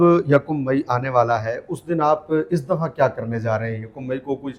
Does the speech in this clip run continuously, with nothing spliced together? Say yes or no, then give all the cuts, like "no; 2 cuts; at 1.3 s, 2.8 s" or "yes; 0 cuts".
yes; 0 cuts